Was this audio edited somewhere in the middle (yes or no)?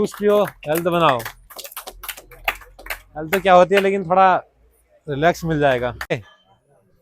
yes